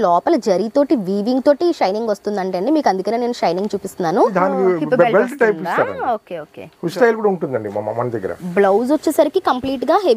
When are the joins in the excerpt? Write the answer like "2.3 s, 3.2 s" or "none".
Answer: 4.3 s, 6.9 s